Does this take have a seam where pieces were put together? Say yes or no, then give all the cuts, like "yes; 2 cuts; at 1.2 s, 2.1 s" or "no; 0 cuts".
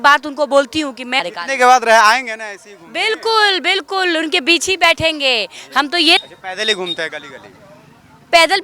yes; 2 cuts; at 1.2 s, 6.2 s